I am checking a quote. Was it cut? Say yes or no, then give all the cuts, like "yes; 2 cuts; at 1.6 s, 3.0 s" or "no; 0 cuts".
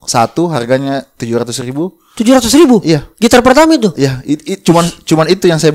no; 0 cuts